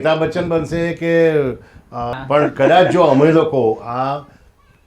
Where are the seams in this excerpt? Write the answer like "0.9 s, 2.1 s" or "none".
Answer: 2.1 s